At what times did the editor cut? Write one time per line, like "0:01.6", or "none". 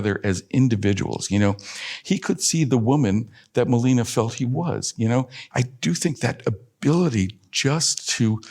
0:01.9
0:05.4